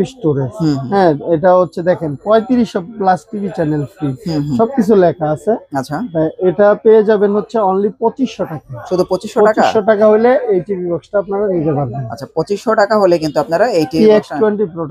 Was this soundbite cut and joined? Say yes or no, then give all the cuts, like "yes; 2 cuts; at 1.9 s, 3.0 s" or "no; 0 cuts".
no; 0 cuts